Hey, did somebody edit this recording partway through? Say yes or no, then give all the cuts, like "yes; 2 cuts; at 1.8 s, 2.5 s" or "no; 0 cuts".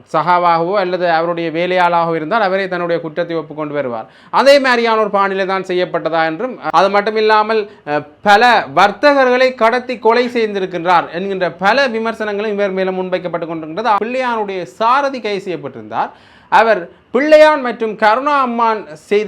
yes; 2 cuts; at 6.6 s, 14.0 s